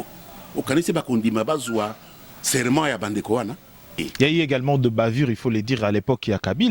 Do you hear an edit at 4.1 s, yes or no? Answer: yes